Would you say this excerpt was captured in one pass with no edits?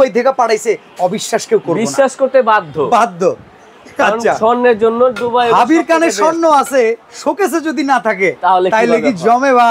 yes; 0 cuts

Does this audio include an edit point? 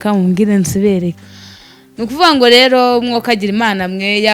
yes; 1 cut; at 1.2 s

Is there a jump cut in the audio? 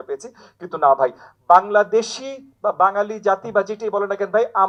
no; 0 cuts

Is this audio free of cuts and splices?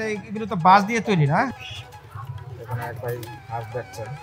no; 1 cut; at 1.5 s

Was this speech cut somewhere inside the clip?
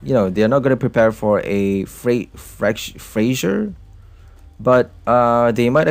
no; 0 cuts

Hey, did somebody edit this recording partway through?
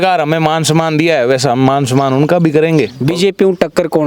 yes; 1 cut; at 3.0 s

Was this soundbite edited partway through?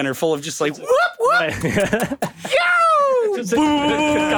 no; 0 cuts

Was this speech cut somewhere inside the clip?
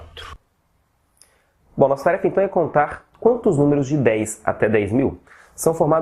yes; 1 cut; at 4.9 s

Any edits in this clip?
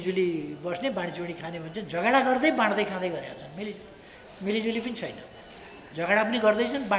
no; 0 cuts

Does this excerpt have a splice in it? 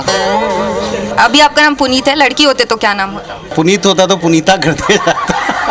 yes; 2 cuts; at 1.0 s, 3.5 s

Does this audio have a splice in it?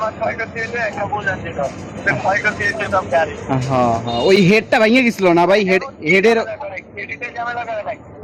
no; 0 cuts

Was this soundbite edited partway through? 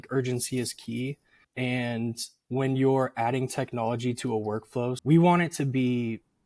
yes; 1 cut; at 5.0 s

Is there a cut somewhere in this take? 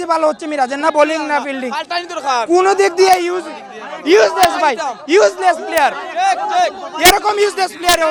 no; 0 cuts

